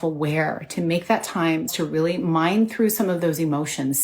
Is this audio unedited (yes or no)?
no